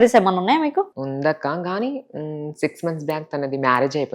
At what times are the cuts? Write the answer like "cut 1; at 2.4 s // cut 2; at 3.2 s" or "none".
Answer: cut 1; at 0.9 s